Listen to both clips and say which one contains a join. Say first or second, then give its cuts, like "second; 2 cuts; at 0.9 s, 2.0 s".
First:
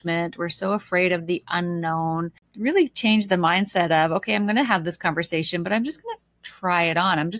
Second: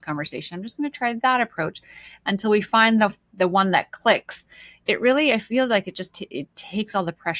first; 1 cut; at 2.4 s